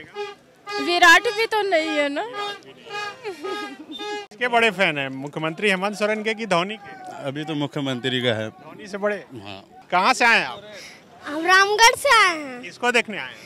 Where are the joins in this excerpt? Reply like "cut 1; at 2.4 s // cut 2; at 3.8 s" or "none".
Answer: cut 1; at 4.3 s // cut 2; at 9.7 s